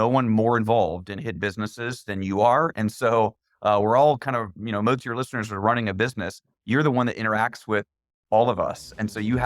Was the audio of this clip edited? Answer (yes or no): no